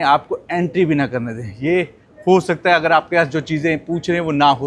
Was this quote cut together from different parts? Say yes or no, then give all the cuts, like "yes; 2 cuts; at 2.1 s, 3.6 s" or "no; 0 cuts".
no; 0 cuts